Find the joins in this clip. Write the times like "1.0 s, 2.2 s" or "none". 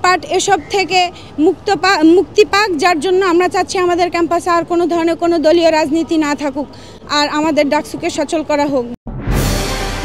none